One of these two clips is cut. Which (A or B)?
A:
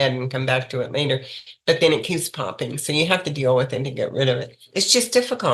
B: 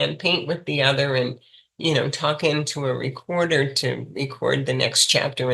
A